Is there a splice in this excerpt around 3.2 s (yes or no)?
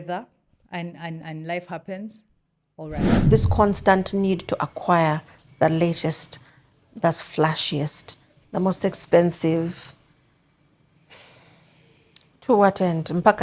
yes